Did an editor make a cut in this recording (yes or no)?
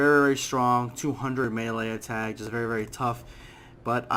no